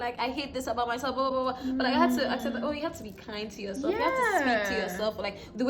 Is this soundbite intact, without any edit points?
yes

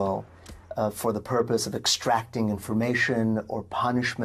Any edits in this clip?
yes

